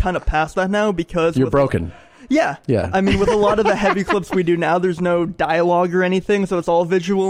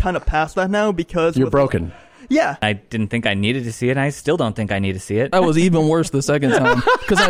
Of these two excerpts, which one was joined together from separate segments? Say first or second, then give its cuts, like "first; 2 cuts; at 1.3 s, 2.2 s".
second; 2 cuts; at 2.6 s, 5.3 s